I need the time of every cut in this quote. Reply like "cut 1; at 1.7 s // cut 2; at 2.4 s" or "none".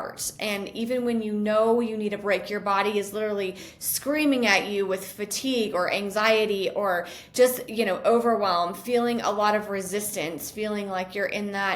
none